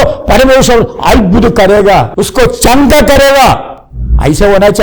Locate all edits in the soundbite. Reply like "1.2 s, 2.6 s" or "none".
2.2 s